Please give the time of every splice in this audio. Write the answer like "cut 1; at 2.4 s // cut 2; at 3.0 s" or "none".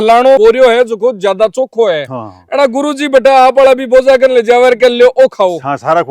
none